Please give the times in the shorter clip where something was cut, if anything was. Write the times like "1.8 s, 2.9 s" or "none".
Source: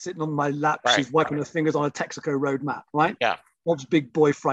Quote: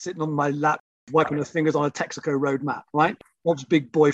3.2 s